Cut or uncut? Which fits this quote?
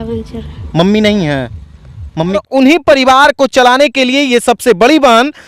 cut